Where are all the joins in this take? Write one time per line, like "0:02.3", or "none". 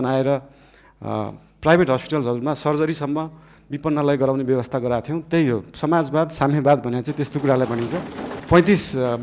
0:08.3